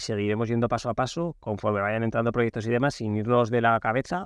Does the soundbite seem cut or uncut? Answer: uncut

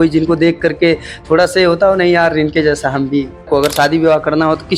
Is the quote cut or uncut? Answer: cut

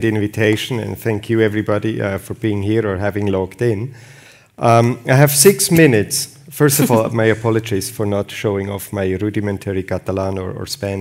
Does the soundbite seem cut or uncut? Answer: cut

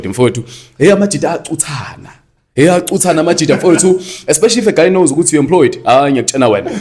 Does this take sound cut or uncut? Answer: uncut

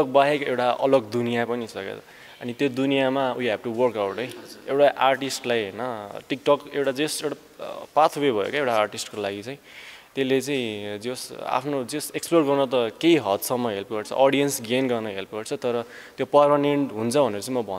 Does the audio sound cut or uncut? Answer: uncut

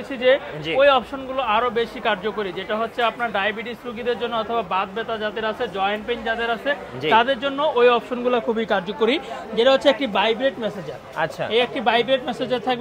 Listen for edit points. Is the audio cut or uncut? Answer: uncut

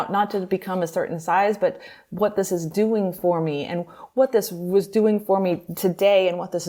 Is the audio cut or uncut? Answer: uncut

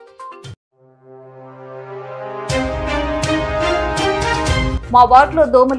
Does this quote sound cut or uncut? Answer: cut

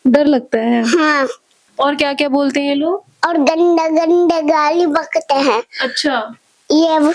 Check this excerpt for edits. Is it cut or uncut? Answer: cut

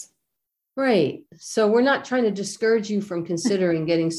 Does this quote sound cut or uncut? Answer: uncut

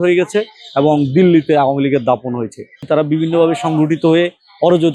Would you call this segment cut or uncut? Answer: cut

